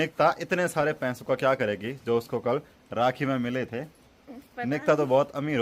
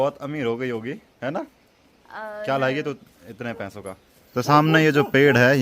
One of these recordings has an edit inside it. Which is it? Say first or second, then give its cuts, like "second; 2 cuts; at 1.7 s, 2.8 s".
second; 1 cut; at 4.1 s